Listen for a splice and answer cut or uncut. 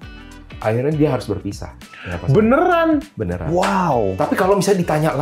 uncut